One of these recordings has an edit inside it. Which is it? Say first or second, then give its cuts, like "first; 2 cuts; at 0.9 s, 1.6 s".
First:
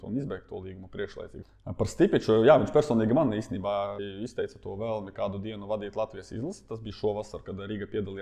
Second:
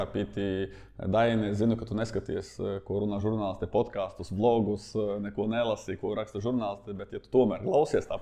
first; 2 cuts; at 1.3 s, 4.0 s